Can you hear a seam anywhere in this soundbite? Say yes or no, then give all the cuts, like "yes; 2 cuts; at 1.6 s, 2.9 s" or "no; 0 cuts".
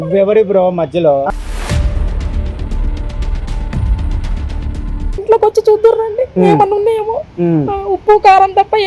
yes; 1 cut; at 5.1 s